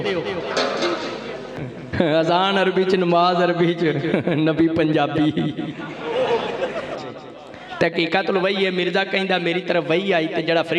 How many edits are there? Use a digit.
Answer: 2